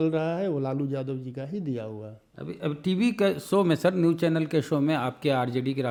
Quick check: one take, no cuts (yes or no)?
yes